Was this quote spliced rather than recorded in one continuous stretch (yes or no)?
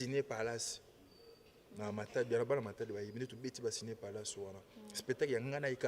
no